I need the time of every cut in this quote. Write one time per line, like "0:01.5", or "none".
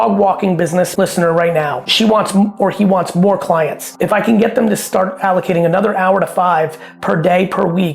0:00.9
0:01.9
0:03.8